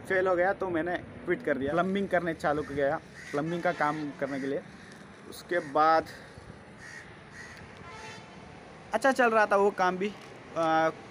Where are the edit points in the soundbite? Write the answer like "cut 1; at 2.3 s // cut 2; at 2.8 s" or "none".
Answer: none